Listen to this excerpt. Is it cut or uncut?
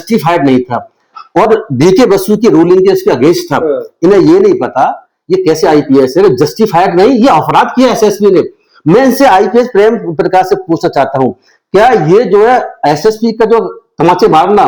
uncut